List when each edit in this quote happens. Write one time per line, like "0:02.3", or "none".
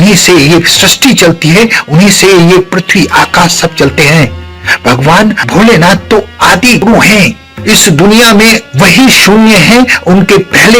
0:06.8